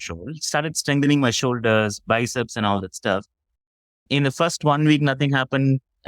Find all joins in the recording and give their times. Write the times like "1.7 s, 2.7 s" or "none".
3.4 s